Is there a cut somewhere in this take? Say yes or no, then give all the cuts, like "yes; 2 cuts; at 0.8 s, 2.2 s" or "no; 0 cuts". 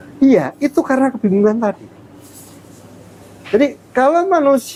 no; 0 cuts